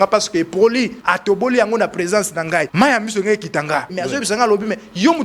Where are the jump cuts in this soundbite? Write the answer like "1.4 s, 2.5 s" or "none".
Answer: 1.0 s, 2.7 s, 4.0 s